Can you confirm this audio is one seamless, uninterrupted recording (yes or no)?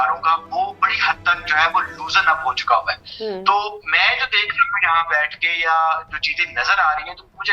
yes